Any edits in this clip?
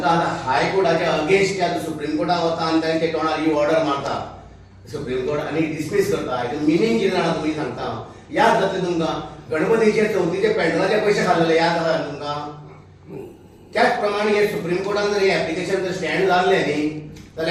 no; 0 cuts

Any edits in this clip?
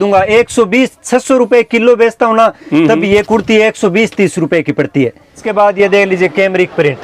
yes; 1 cut; at 5.4 s

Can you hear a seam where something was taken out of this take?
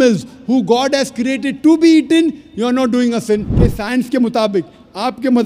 yes; 1 cut; at 3.6 s

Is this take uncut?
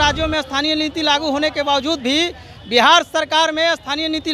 yes; 0 cuts

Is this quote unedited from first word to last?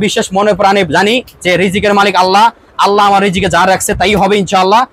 yes; 0 cuts

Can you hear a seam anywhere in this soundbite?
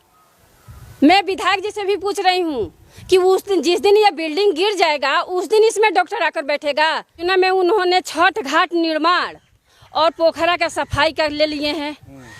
yes; 1 cut; at 7.3 s

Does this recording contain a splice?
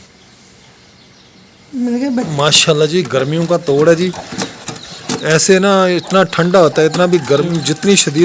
yes; 2 cuts; at 2.3 s, 7.3 s

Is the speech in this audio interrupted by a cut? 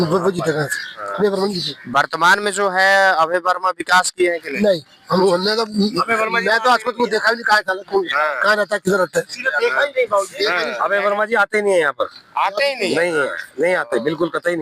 no; 0 cuts

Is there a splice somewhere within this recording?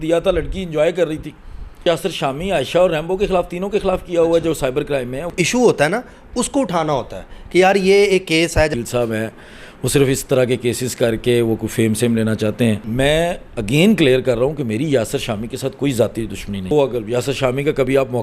yes; 5 cuts; at 1.8 s, 5.3 s, 8.7 s, 12.8 s, 16.7 s

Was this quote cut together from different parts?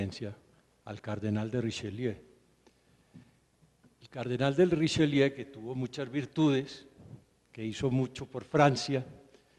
no; 0 cuts

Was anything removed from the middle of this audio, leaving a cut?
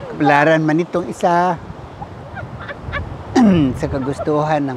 no; 0 cuts

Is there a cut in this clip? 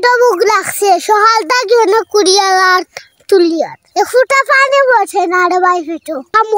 no; 0 cuts

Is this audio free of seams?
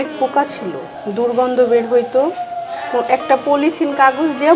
yes; 0 cuts

